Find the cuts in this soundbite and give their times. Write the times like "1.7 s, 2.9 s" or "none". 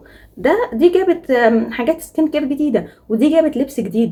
none